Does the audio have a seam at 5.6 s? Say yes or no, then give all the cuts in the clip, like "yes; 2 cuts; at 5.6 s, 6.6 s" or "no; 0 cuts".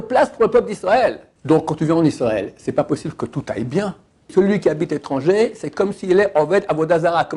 no; 2 cuts; at 1.3 s, 4.3 s